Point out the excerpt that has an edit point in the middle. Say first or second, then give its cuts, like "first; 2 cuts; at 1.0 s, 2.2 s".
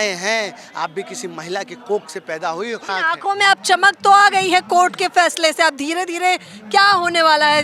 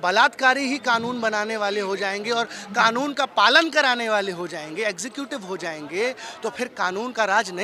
first; 1 cut; at 2.9 s